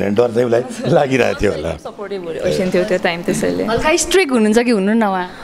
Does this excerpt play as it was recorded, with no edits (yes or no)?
yes